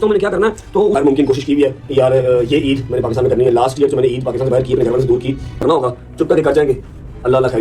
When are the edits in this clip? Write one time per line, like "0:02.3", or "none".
0:00.9
0:05.6